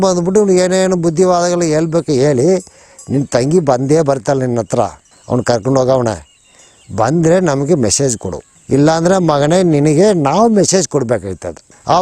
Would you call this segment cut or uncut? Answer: uncut